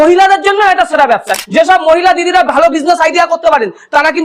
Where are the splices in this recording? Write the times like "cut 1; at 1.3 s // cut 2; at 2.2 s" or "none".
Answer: cut 1; at 1.3 s